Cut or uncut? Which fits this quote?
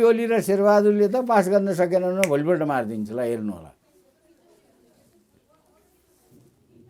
uncut